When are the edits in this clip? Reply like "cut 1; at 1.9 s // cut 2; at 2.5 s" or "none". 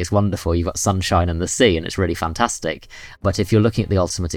cut 1; at 3.2 s